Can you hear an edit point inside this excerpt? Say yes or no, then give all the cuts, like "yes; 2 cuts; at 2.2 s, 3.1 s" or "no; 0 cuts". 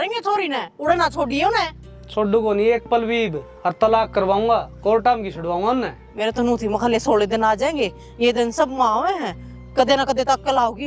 no; 0 cuts